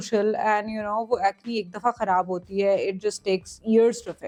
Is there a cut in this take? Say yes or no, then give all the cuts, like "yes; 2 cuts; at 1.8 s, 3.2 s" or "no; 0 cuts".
no; 0 cuts